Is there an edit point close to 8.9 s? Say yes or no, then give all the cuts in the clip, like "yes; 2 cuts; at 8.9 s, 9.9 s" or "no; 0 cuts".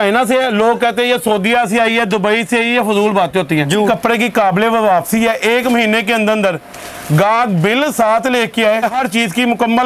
yes; 2 cuts; at 3.9 s, 8.9 s